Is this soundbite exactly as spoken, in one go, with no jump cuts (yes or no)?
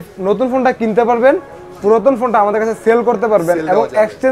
yes